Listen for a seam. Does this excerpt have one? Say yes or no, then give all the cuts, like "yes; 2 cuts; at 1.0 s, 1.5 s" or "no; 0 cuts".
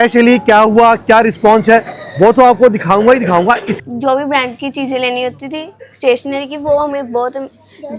yes; 1 cut; at 3.8 s